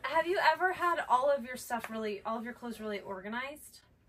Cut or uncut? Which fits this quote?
uncut